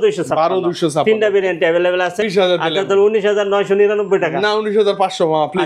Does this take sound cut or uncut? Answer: cut